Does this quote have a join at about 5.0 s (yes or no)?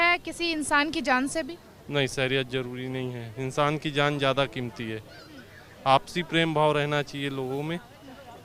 no